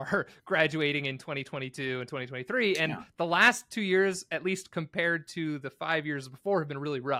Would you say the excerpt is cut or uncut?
uncut